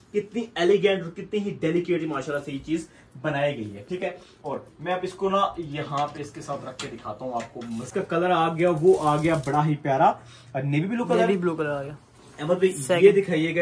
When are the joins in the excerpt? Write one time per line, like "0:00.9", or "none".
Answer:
0:07.9